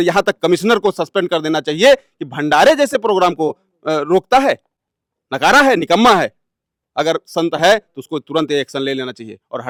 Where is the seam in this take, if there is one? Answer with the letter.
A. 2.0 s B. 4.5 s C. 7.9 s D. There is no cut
D